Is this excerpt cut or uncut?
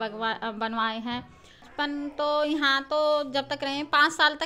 cut